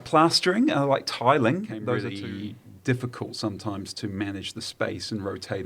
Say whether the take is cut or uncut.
cut